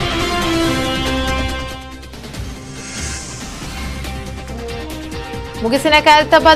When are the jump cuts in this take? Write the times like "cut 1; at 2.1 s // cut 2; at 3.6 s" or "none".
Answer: cut 1; at 3.8 s